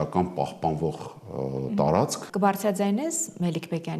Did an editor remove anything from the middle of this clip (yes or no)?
yes